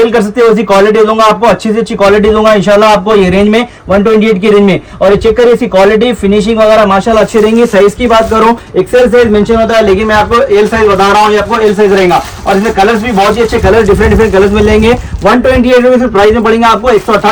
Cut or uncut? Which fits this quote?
uncut